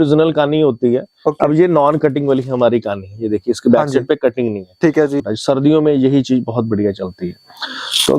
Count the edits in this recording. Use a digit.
1